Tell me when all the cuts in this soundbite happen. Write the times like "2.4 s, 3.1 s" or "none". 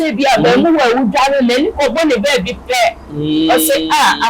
none